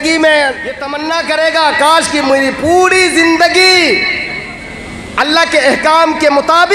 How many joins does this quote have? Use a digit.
1